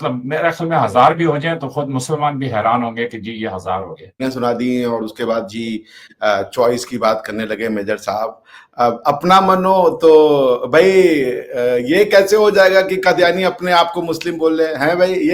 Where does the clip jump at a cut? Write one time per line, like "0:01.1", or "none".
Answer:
0:04.2